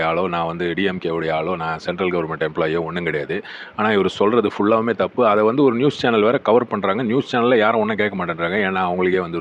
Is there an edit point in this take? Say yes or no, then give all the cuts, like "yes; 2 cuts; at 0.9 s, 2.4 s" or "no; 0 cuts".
no; 0 cuts